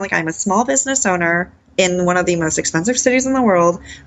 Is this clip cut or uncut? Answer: cut